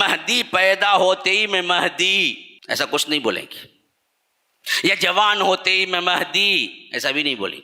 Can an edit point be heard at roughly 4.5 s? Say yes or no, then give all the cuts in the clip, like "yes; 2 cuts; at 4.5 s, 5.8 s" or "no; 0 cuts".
no; 1 cut; at 2.5 s